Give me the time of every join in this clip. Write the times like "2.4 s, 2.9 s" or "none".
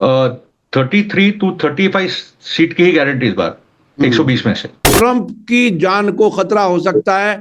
4.9 s